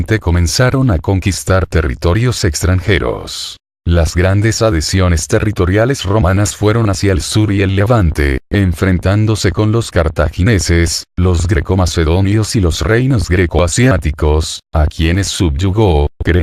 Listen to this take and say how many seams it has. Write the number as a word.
one